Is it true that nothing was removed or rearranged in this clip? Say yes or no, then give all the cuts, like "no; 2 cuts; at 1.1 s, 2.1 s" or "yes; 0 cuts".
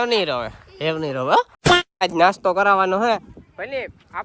no; 1 cut; at 2.0 s